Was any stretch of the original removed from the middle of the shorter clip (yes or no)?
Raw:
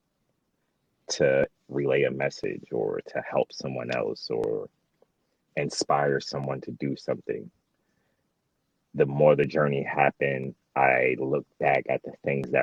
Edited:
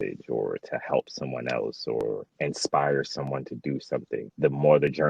yes